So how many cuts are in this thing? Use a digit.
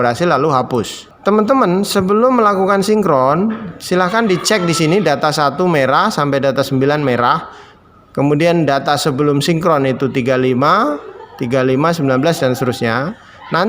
1